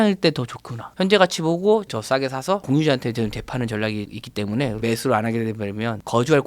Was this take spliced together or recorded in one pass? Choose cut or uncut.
cut